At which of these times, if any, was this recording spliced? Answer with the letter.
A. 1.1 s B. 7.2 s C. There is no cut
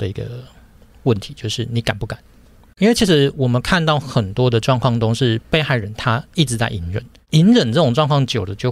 B